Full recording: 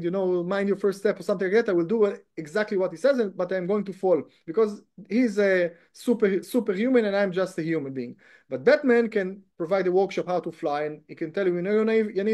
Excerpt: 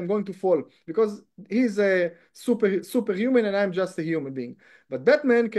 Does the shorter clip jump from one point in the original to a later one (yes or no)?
no